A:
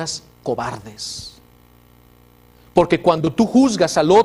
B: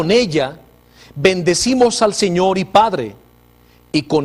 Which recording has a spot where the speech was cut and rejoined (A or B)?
B